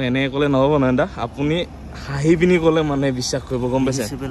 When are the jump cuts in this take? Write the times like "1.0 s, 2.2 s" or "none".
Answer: none